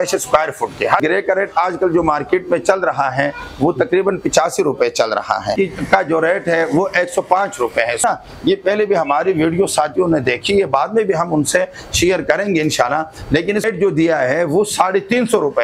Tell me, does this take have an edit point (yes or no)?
yes